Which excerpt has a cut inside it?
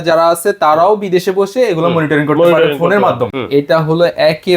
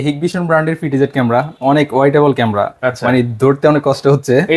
first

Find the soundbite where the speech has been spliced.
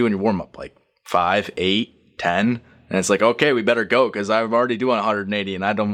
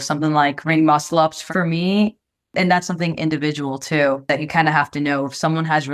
second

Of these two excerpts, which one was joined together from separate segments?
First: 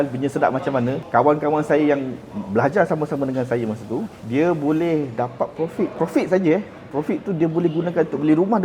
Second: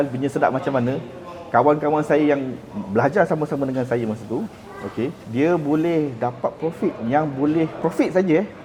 first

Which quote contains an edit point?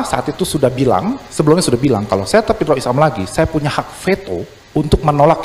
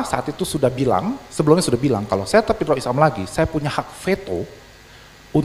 first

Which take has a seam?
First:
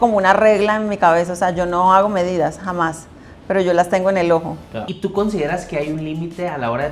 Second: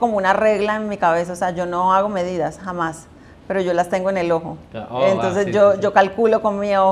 first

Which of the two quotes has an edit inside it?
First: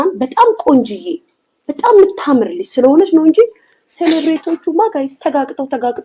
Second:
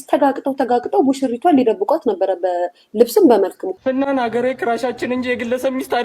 second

